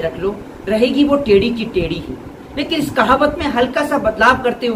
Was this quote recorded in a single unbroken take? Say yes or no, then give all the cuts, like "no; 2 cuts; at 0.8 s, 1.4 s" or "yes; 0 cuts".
yes; 0 cuts